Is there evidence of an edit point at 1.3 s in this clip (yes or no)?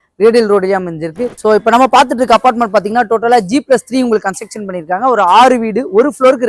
yes